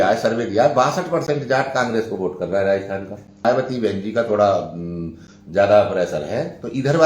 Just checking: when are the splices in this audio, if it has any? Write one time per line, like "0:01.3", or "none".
0:03.4